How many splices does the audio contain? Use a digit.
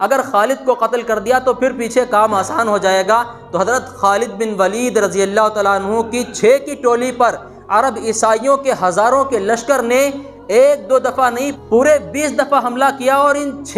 1